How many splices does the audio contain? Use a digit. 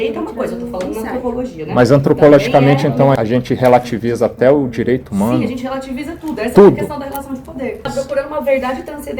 2